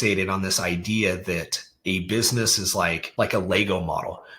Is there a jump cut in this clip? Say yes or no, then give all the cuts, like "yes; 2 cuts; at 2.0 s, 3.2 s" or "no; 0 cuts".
yes; 1 cut; at 3.0 s